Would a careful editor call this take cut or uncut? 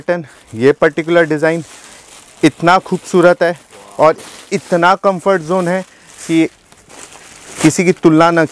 uncut